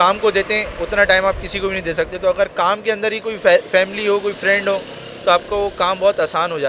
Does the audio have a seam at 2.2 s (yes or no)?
no